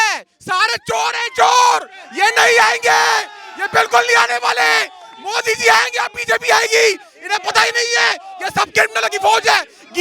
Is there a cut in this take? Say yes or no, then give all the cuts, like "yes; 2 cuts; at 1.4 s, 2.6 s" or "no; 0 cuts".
no; 0 cuts